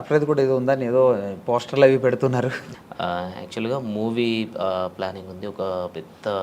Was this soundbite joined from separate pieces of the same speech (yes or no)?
yes